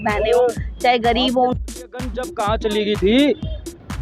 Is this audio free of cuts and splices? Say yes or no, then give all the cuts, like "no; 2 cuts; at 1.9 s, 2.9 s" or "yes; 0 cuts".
no; 1 cut; at 1.5 s